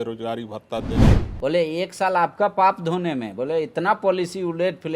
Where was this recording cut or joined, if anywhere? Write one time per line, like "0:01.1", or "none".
0:00.9